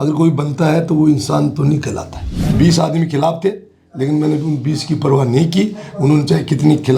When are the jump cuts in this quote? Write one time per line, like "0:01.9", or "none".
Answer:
0:02.4